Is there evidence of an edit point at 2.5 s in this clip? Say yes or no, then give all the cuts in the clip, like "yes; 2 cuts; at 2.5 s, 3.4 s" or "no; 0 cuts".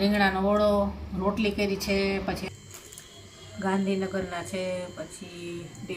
yes; 1 cut; at 2.5 s